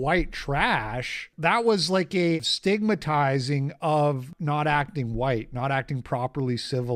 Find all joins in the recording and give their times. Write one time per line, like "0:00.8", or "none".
0:01.3
0:02.4
0:04.3